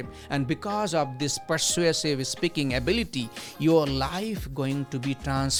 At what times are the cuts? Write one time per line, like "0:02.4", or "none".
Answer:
none